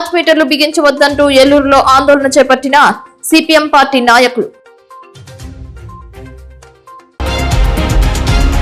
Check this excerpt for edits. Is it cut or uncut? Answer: cut